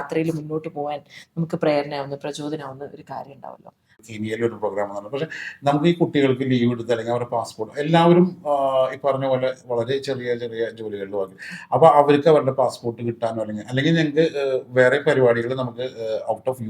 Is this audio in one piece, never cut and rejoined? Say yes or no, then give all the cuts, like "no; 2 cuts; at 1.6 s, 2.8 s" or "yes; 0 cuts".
no; 1 cut; at 3.9 s